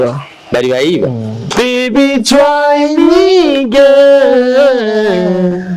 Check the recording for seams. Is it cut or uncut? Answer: cut